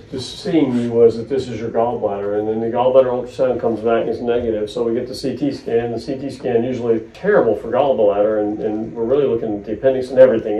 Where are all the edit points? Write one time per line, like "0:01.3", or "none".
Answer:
none